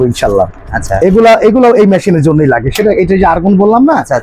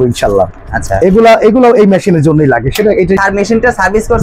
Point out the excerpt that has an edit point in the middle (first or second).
second